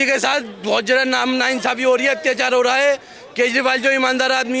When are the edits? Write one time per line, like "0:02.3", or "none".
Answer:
none